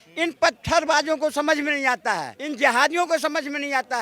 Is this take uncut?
no; 1 cut; at 2.4 s

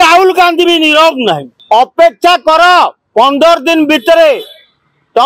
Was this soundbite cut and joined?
yes; 1 cut; at 1.5 s

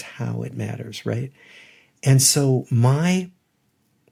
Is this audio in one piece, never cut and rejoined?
yes; 0 cuts

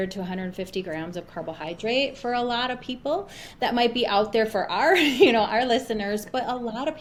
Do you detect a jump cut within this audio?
no; 0 cuts

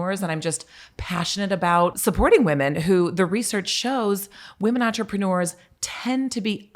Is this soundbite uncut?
no; 1 cut; at 2.0 s

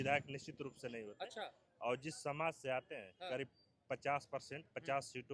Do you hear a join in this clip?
no; 0 cuts

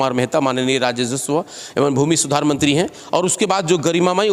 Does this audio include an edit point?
no; 0 cuts

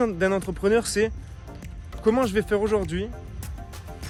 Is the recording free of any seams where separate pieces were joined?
yes; 0 cuts

